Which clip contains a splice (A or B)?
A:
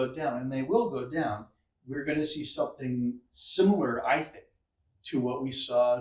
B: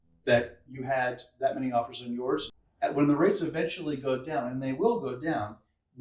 B